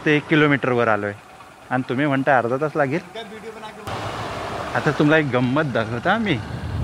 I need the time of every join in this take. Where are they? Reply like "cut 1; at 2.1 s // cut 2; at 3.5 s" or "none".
cut 1; at 3.9 s